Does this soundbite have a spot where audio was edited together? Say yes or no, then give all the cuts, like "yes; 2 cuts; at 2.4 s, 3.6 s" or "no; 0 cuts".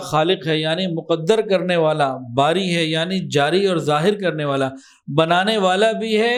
no; 0 cuts